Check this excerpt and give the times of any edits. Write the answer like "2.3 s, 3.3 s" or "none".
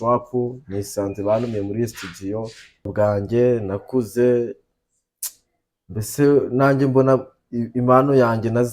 2.9 s